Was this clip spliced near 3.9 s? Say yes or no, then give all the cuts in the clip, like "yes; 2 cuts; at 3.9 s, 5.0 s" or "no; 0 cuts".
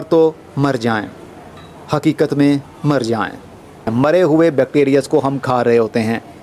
yes; 1 cut; at 3.9 s